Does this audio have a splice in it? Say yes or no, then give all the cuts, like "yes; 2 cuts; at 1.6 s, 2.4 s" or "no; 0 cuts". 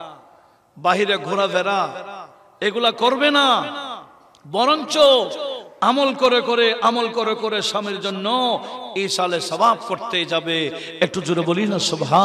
no; 0 cuts